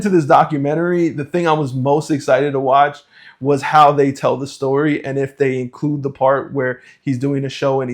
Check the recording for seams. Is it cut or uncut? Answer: uncut